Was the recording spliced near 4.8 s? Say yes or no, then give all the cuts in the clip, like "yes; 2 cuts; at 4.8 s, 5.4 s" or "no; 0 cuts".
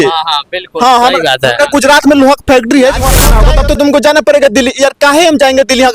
no; 1 cut; at 3.2 s